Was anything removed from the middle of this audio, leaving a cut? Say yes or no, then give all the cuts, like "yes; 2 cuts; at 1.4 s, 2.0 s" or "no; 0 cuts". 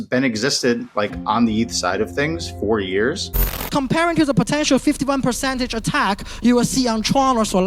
no; 0 cuts